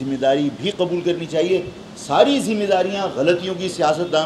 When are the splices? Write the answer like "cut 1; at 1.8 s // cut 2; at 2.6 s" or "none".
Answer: none